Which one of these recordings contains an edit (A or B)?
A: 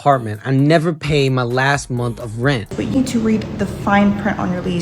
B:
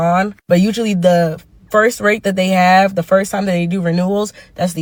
A